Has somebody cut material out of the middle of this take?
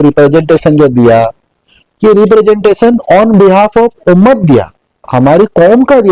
no; 0 cuts

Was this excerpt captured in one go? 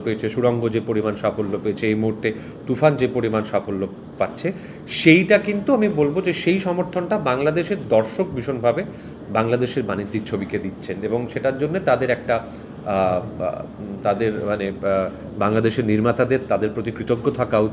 yes; 0 cuts

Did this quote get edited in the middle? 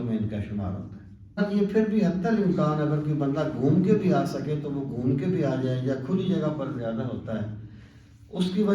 yes; 1 cut; at 1.4 s

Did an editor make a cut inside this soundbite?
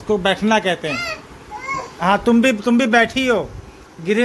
no; 0 cuts

